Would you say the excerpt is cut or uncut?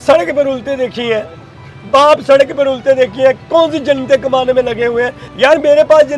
cut